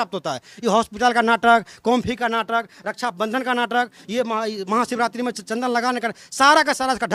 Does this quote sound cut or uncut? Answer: uncut